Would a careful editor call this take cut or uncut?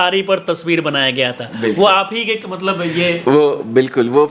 uncut